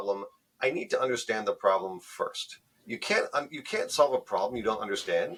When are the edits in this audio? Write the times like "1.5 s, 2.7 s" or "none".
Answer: none